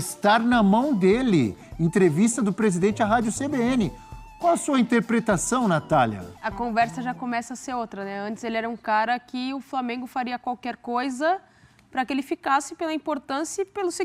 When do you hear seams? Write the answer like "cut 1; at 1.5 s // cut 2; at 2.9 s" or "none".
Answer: none